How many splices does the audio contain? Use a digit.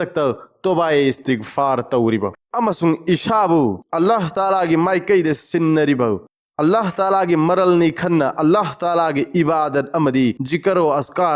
2